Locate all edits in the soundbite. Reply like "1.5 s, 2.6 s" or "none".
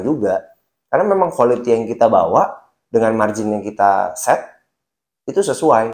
none